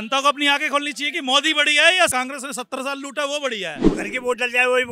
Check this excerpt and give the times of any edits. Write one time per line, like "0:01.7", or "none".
0:03.8